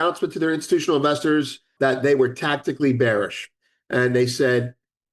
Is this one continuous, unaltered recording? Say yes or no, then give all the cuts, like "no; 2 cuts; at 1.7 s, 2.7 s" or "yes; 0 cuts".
no; 1 cut; at 1.7 s